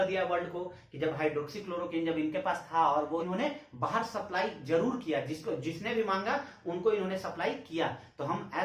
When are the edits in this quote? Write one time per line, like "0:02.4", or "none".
0:03.3